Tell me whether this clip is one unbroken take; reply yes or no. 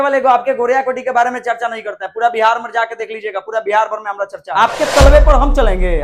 no